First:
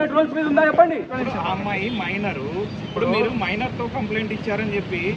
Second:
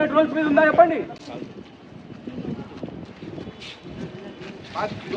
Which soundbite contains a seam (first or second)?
first